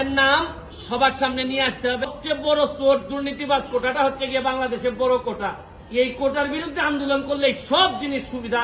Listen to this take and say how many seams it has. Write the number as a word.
one